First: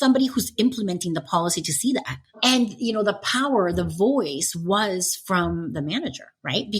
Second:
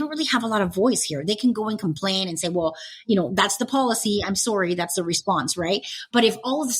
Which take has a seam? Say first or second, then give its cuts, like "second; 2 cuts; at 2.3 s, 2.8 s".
first; 1 cut; at 2.3 s